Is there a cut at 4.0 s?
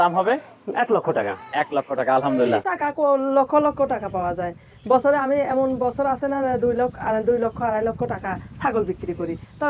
no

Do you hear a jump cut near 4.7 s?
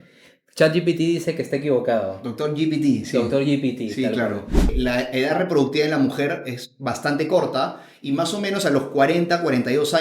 yes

